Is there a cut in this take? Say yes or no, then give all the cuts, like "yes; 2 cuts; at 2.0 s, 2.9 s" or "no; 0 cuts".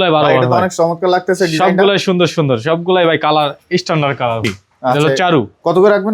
yes; 1 cut; at 4.5 s